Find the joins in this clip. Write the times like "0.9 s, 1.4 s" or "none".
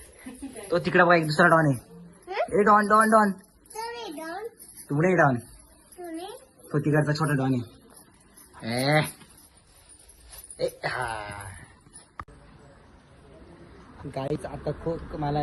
none